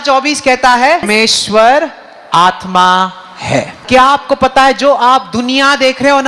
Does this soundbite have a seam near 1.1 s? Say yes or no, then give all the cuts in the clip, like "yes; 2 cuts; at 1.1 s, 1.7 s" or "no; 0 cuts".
yes; 2 cuts; at 1.1 s, 3.8 s